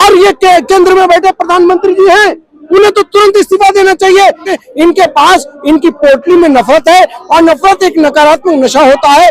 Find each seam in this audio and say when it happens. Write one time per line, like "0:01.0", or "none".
0:04.5

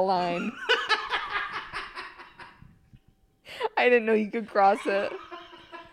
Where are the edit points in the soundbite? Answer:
none

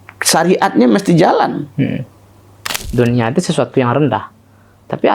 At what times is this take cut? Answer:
0:02.7

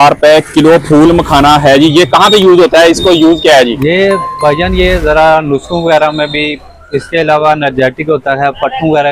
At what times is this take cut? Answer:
none

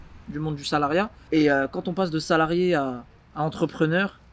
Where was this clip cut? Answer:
0:01.2

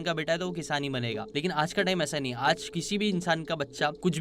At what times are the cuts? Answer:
0:01.3

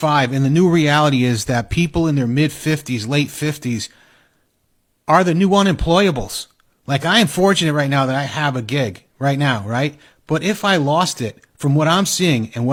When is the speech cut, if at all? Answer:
none

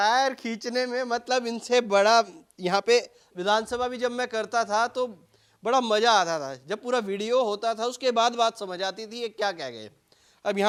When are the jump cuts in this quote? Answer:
none

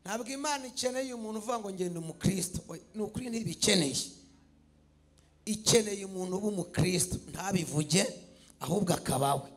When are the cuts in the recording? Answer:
none

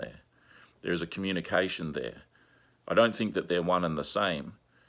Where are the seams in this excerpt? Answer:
none

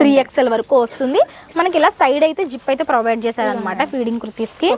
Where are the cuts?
none

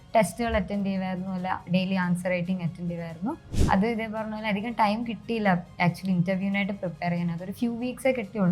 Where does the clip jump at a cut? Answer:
0:03.5

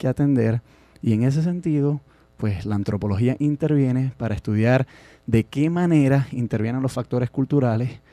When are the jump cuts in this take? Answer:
0:05.5

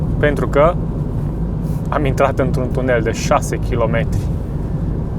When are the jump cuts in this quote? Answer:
none

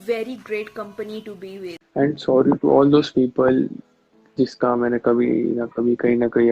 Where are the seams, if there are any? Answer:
0:01.8

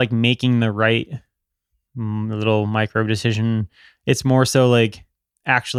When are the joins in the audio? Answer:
none

